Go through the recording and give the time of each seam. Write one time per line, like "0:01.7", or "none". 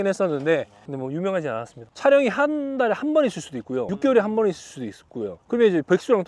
0:01.8
0:03.9

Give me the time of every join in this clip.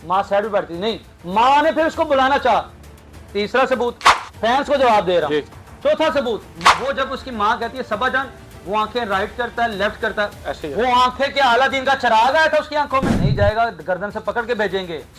0:13.2

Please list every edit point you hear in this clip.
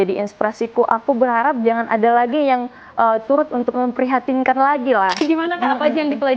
0:03.7
0:05.2

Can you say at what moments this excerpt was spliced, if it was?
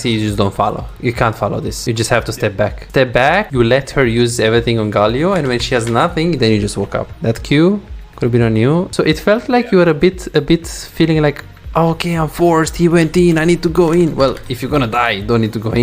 0:00.9
0:01.7
0:02.8
0:03.5
0:07.1
0:08.9

